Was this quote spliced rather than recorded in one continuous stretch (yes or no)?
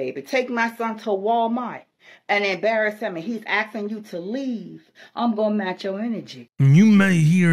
yes